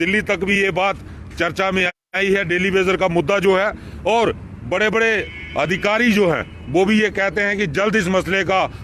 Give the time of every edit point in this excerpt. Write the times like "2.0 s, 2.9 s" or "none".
5.9 s